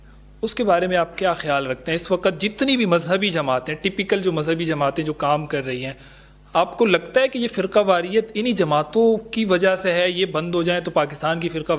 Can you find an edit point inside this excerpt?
no; 0 cuts

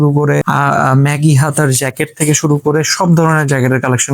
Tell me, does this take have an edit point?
no; 0 cuts

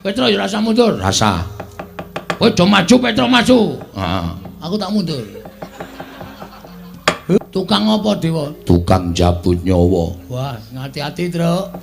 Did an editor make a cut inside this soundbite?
yes; 1 cut; at 7.4 s

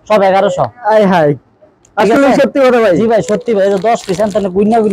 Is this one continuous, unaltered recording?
yes; 0 cuts

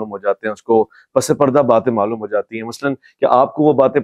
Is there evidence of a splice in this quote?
no; 0 cuts

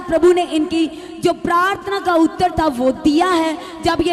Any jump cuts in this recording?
no; 0 cuts

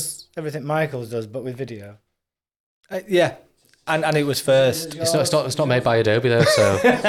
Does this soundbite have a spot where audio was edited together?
no; 0 cuts

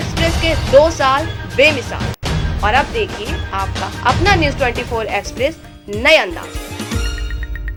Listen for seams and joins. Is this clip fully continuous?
yes; 0 cuts

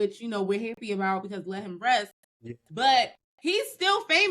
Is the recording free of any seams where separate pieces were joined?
no; 1 cut; at 3.2 s

